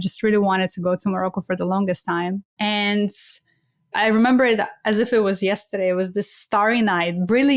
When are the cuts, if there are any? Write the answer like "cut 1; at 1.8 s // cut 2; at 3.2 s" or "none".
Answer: cut 1; at 2.5 s // cut 2; at 3.9 s